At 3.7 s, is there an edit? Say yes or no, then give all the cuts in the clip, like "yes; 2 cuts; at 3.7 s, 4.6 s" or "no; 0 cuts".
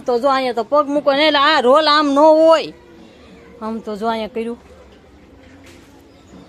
no; 0 cuts